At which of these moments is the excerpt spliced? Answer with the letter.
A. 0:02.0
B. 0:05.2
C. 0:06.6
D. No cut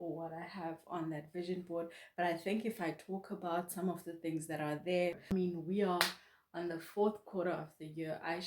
B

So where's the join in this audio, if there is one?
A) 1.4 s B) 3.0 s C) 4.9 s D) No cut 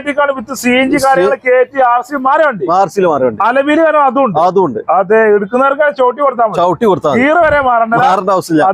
D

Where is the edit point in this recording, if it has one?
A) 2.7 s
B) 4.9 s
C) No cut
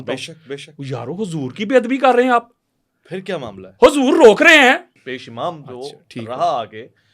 B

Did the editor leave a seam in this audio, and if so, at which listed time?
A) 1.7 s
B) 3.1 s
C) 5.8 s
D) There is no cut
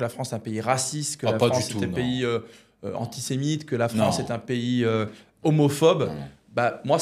D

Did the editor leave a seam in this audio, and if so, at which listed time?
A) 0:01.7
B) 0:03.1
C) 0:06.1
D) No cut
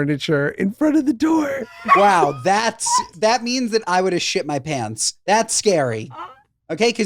A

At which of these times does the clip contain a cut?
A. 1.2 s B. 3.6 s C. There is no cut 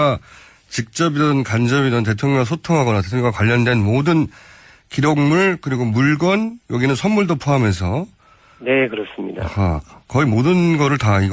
A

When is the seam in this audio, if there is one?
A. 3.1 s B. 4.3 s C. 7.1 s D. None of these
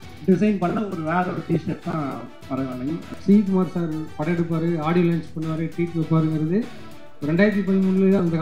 A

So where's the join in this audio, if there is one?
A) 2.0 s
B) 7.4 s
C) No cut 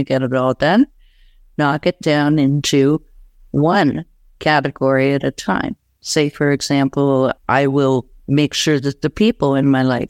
B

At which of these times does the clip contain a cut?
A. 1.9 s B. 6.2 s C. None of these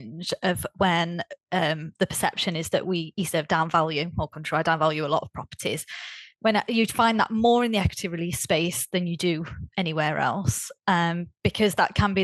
C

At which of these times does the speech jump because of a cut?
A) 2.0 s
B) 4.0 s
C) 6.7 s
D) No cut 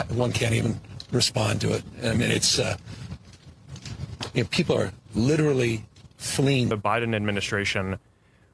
C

